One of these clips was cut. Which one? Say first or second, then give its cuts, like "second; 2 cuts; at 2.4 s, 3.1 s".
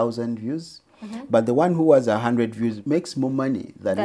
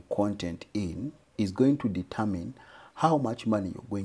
first; 1 cut; at 2.8 s